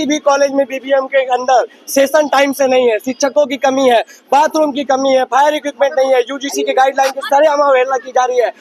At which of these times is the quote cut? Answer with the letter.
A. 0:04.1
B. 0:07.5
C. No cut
C